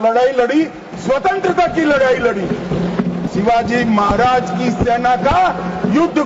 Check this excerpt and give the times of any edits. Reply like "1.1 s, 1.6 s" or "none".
3.3 s